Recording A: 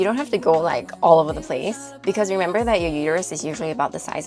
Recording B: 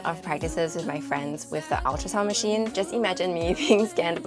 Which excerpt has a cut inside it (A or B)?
B